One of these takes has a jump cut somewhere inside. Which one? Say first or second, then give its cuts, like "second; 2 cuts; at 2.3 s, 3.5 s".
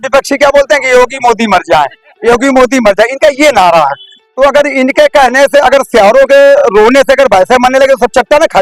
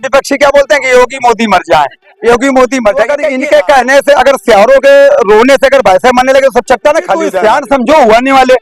second; 2 cuts; at 3.2 s, 7.3 s